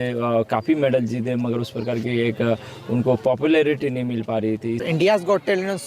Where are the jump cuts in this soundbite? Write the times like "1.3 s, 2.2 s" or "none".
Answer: 4.8 s